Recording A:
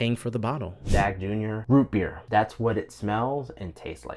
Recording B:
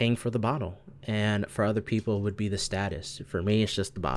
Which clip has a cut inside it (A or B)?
A